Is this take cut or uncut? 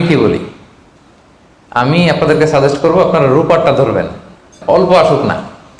cut